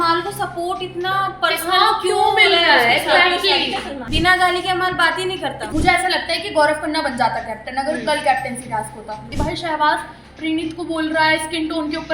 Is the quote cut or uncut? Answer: cut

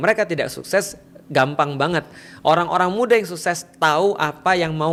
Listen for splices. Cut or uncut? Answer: uncut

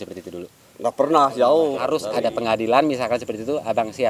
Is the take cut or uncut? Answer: cut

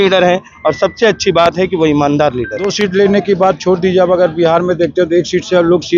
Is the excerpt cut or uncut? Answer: cut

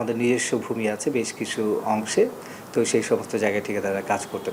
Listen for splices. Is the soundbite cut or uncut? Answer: uncut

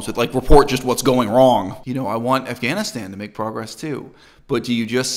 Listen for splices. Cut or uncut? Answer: cut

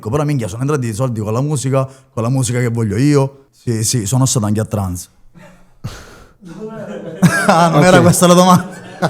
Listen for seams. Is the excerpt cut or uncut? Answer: cut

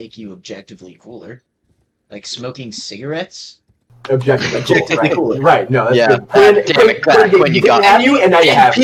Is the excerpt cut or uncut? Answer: uncut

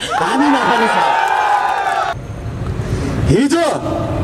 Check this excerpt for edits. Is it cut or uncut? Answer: cut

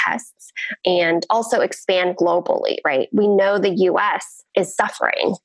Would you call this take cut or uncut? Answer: cut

